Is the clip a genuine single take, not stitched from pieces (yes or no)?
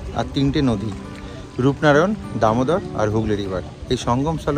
yes